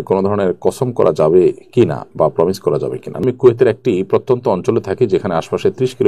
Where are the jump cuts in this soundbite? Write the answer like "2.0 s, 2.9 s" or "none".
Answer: 3.1 s